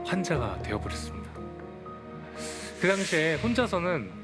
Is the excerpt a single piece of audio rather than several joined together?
yes; 0 cuts

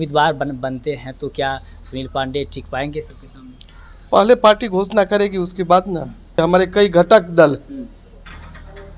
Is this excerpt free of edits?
no; 1 cut; at 6.4 s

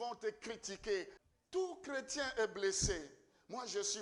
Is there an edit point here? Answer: yes; 1 cut; at 1.2 s

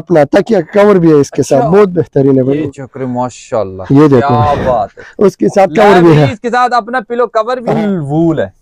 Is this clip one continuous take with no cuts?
no; 2 cuts; at 2.7 s, 7.6 s

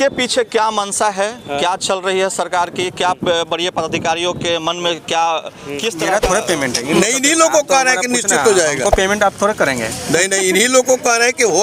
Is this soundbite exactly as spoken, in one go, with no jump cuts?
no; 1 cut; at 6.0 s

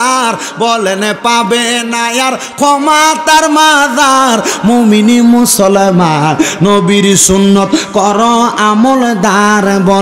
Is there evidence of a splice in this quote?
no; 0 cuts

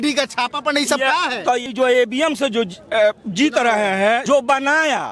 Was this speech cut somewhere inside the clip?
yes; 2 cuts; at 1.7 s, 4.2 s

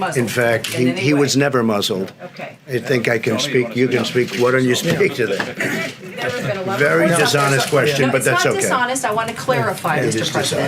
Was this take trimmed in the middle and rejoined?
no; 0 cuts

